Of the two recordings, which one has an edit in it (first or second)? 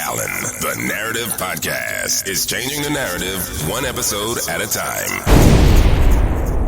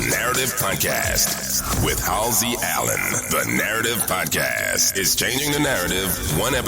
first